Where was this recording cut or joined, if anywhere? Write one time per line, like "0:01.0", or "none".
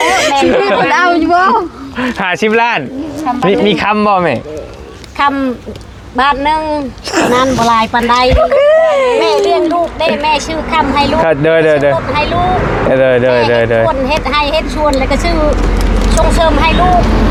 none